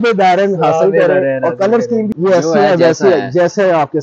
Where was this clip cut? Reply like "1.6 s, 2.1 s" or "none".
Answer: 2.1 s